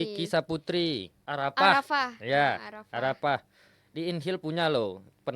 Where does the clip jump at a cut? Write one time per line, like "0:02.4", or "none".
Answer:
0:01.2